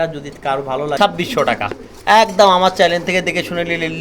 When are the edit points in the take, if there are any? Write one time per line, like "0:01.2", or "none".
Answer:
0:01.0